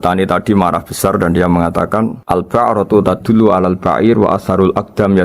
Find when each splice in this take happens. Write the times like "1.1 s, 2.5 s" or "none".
2.2 s